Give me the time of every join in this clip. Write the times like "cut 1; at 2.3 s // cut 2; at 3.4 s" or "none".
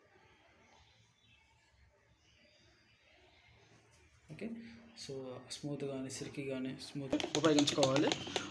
cut 1; at 7.1 s